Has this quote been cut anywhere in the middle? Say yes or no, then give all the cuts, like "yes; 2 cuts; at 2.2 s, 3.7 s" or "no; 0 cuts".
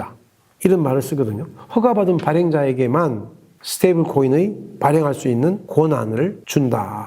yes; 1 cut; at 5.8 s